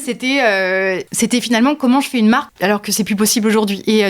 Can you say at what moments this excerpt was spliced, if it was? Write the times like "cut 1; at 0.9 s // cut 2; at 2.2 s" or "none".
cut 1; at 1.1 s // cut 2; at 2.5 s